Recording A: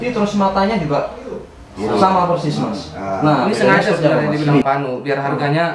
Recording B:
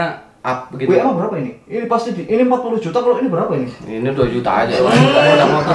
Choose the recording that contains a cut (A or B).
A